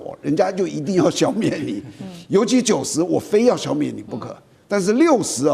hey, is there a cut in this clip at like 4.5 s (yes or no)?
no